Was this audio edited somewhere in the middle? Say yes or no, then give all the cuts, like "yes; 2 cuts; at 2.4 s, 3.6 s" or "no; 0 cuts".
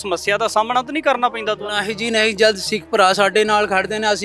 no; 0 cuts